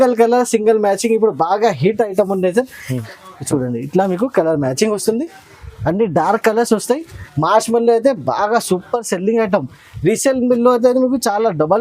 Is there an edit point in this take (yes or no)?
yes